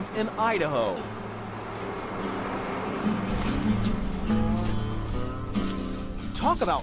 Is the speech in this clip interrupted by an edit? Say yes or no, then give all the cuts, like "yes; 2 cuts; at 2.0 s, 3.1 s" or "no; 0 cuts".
yes; 1 cut; at 3.0 s